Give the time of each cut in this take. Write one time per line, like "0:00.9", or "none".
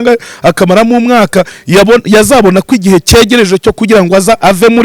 none